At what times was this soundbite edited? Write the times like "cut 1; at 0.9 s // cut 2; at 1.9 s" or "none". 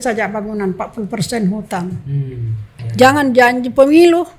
cut 1; at 2.8 s